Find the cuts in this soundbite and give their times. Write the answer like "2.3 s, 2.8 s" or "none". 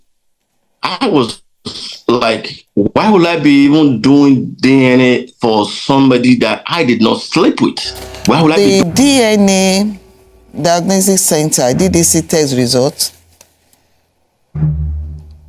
8.4 s